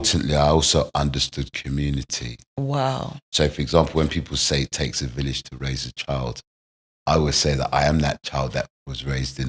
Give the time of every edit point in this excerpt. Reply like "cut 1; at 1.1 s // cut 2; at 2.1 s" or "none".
none

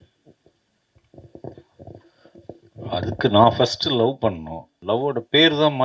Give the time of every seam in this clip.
cut 1; at 4.7 s

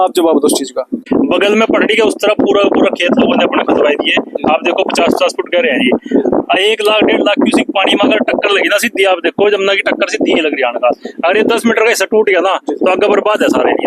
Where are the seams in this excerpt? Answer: cut 1; at 1.0 s

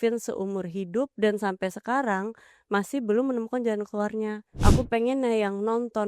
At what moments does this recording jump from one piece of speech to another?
cut 1; at 4.5 s

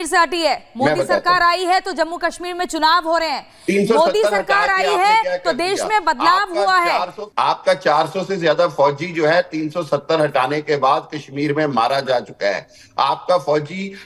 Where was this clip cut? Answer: cut 1; at 7.2 s

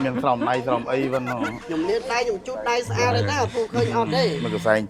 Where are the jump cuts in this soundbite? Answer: cut 1; at 1.5 s

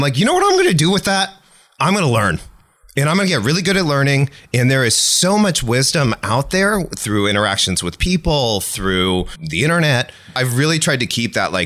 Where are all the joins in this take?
none

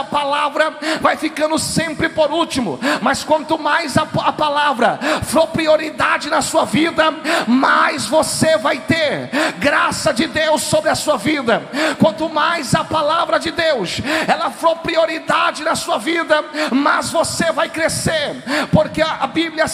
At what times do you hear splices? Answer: none

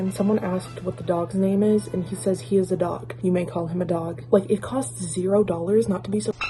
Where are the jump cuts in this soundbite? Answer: none

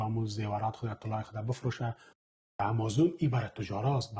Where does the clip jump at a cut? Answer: cut 1; at 2.5 s

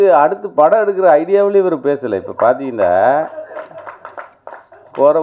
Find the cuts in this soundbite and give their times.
none

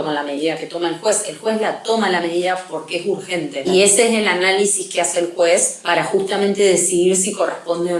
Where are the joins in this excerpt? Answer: cut 1; at 3.7 s // cut 2; at 5.8 s

